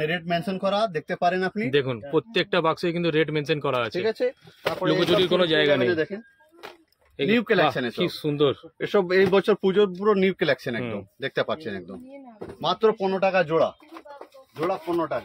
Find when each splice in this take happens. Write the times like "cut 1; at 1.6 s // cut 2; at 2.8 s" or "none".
none